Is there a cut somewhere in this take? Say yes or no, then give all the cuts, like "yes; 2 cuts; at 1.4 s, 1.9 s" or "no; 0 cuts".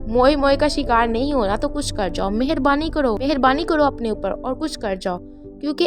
no; 0 cuts